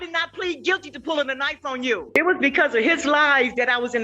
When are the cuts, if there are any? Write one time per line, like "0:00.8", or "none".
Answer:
0:02.0